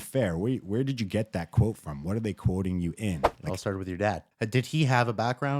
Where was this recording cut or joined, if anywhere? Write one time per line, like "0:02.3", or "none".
0:03.3
0:04.3